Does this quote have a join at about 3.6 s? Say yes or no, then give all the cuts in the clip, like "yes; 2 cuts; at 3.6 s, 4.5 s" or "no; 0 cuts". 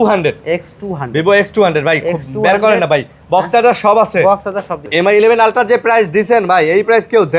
no; 1 cut; at 4.8 s